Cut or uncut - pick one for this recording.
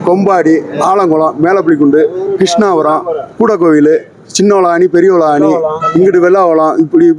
uncut